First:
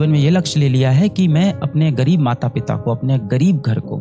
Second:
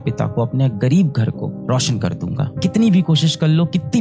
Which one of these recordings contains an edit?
second; 1 cut; at 2.5 s

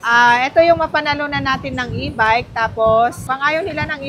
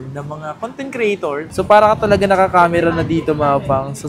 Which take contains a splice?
second; 1 cut; at 1.4 s

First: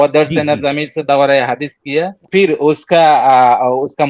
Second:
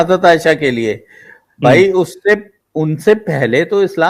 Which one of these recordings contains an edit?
first; 1 cut; at 2.3 s

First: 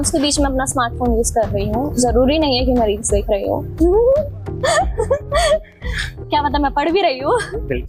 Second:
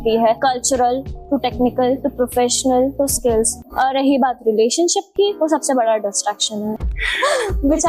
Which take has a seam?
second; 2 cuts; at 3.6 s, 6.8 s

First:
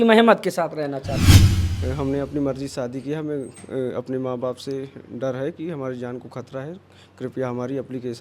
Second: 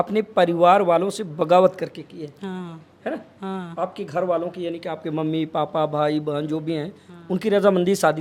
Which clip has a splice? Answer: first; 1 cut; at 1.3 s

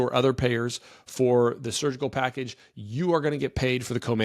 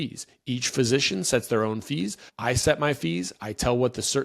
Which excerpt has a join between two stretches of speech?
second; 1 cut; at 2.2 s

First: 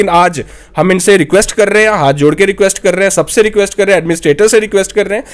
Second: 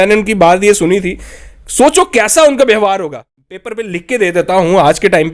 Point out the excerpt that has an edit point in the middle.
second; 1 cut; at 3.0 s

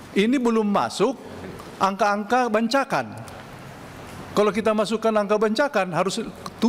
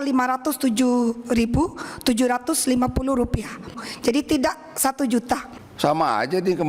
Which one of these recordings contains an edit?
second; 2 cuts; at 3.8 s, 5.4 s

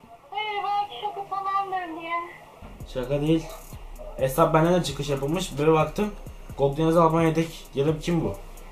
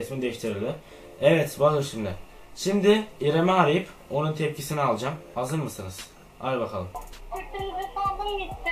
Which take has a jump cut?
second; 1 cut; at 7.0 s

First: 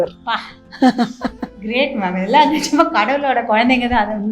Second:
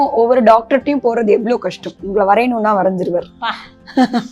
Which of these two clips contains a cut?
second; 1 cut; at 2.0 s

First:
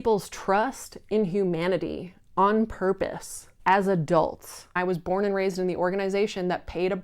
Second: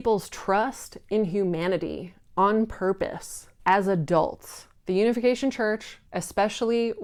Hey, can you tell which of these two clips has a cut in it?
first; 1 cut; at 4.7 s

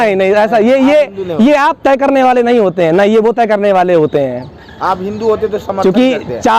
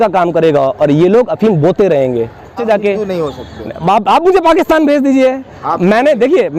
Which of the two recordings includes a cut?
second; 1 cut; at 2.6 s

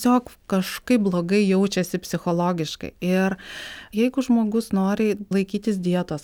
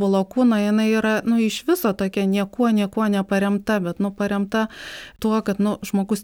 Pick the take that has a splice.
first; 2 cuts; at 3.9 s, 5.3 s

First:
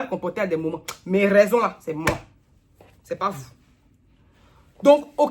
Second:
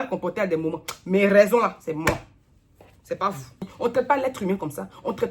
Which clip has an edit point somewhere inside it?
second; 1 cut; at 3.6 s

